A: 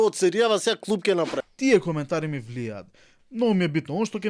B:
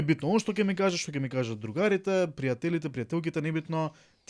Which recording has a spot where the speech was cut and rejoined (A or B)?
A